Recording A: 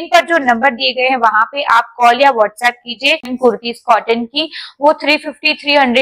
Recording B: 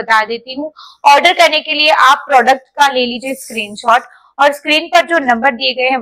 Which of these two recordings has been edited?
A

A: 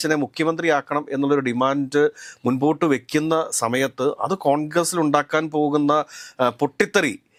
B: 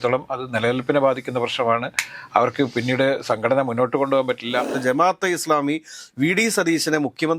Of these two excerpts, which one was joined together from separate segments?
B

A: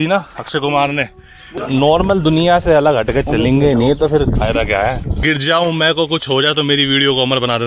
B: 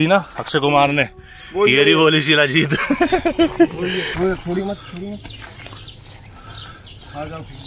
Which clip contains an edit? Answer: A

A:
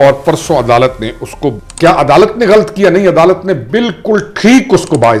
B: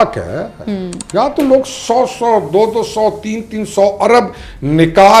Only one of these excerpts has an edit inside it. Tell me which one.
A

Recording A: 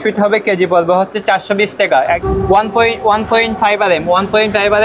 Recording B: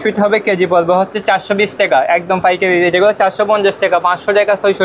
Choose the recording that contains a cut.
A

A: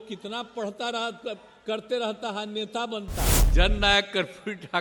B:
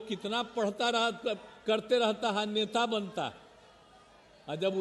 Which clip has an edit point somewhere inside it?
A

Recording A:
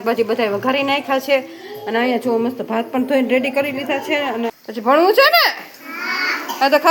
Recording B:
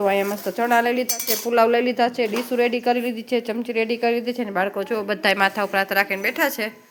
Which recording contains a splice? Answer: A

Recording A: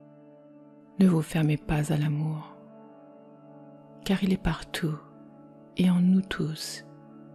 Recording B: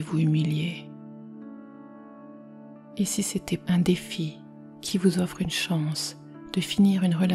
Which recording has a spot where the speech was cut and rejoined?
A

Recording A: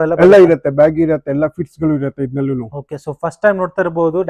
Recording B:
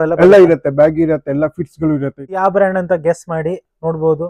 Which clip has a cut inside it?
B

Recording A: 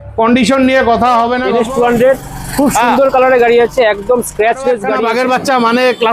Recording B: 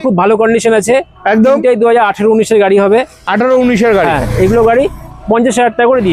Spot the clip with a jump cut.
A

